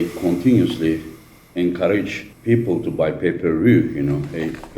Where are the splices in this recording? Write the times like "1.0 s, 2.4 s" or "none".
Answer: 2.2 s